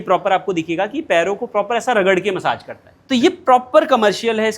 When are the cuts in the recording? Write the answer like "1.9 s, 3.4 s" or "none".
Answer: 2.9 s